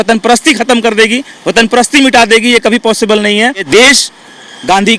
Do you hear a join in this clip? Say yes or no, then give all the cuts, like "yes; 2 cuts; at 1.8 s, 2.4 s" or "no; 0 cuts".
yes; 1 cut; at 3.6 s